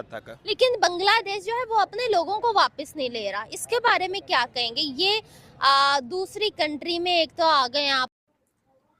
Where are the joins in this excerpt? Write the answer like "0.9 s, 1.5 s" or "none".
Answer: 8.0 s